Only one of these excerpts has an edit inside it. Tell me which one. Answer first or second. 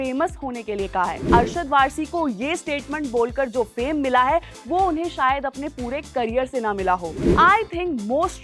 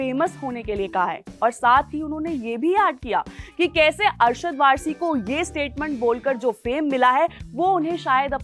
first